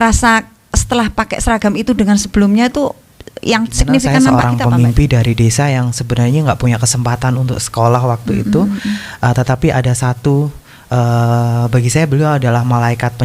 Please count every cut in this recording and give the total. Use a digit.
1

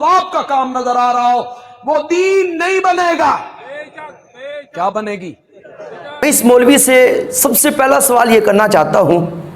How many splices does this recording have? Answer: 1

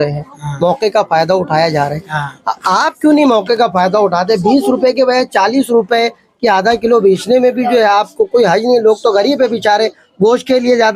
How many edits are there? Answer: 0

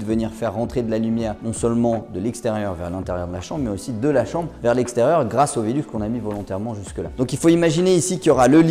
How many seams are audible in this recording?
0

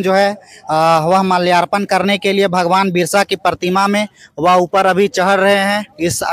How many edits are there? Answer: 0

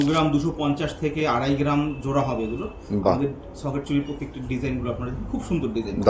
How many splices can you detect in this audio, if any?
0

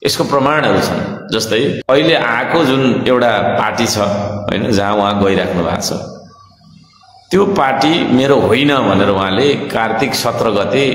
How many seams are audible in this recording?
1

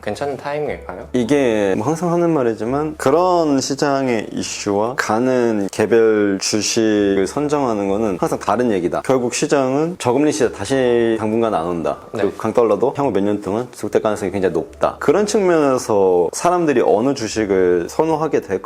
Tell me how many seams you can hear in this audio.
2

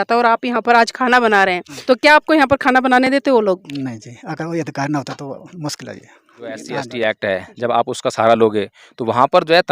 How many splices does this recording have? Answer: 2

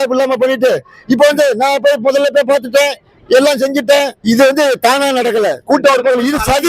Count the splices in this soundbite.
1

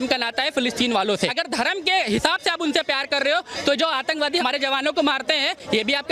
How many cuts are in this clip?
2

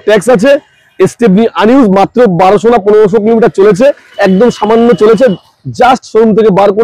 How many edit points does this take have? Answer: 0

